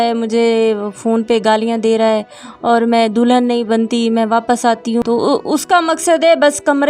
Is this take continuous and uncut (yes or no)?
no